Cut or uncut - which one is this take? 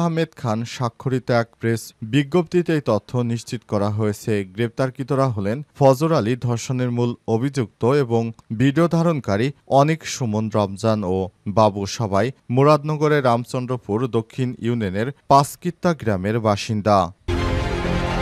cut